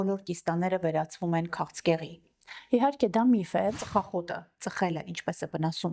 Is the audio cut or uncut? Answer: cut